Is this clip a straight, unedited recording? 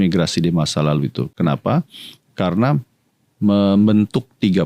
yes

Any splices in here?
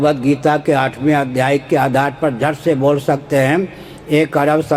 no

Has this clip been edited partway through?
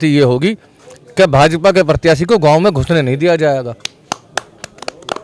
no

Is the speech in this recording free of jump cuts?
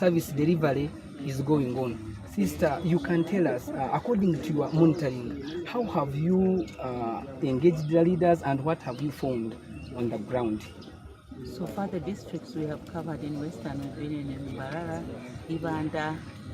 no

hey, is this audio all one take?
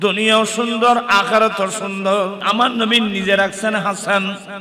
no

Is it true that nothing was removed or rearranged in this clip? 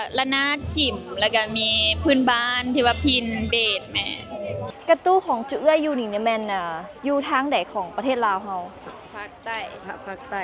no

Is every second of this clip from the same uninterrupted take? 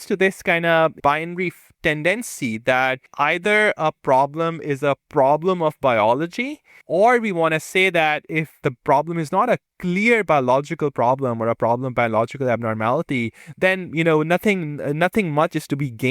no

